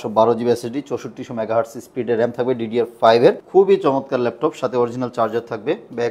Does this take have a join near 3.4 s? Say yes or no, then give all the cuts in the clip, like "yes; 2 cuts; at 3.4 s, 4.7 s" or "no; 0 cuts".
yes; 1 cut; at 3.4 s